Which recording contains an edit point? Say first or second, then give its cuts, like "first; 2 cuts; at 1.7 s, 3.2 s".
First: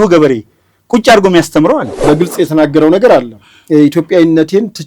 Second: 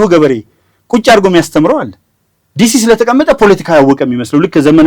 first; 1 cut; at 2.0 s